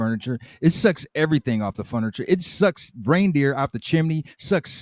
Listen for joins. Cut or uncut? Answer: uncut